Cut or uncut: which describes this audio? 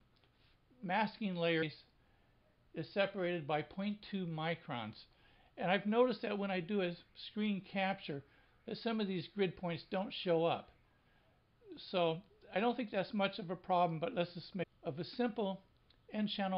uncut